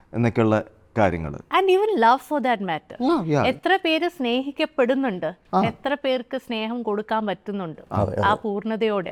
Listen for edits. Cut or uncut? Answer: uncut